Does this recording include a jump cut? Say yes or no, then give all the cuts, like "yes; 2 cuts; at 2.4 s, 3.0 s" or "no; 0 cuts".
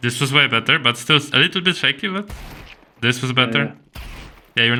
no; 0 cuts